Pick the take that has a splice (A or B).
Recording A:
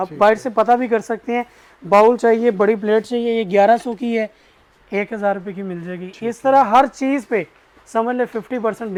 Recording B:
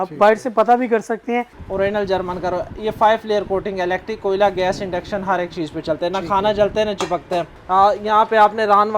B